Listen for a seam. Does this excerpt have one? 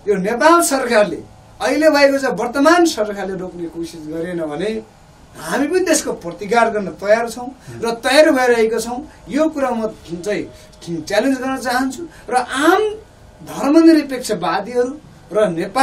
no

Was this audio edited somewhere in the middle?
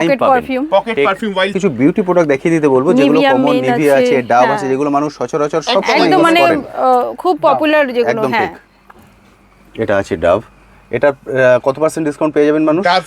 yes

